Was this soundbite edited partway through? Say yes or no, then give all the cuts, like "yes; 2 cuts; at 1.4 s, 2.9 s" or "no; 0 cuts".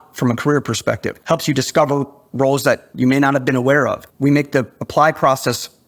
yes; 3 cuts; at 1.1 s, 2.9 s, 4.1 s